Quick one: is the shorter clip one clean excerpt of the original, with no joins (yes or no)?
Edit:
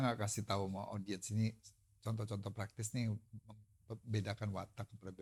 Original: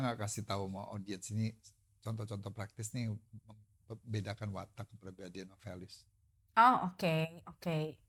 yes